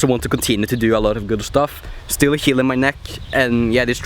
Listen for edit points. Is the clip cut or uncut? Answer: uncut